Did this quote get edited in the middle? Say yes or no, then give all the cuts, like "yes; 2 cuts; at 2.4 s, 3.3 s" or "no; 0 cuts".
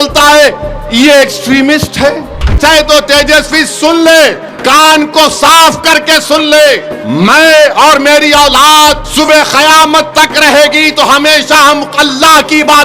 yes; 4 cuts; at 2.5 s, 4.5 s, 6.7 s, 9.0 s